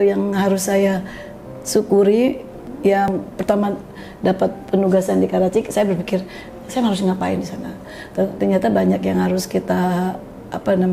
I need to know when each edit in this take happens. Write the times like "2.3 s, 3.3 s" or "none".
3.1 s